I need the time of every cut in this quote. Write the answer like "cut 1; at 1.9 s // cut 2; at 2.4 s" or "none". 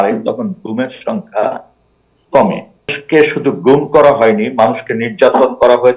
cut 1; at 3.0 s